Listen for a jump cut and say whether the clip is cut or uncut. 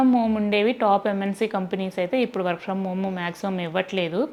uncut